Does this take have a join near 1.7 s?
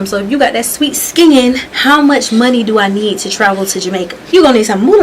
yes; 2 cuts; at 1.7 s, 4.1 s

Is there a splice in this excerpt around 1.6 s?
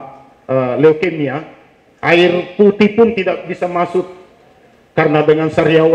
no; 0 cuts

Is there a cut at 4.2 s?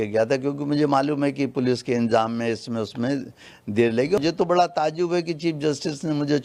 yes; 1 cut; at 4.2 s

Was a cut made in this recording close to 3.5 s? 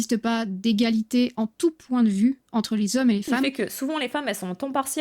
yes; 1 cut; at 3.5 s

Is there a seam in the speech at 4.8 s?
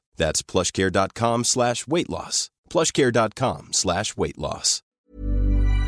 yes; 1 cut; at 4.8 s

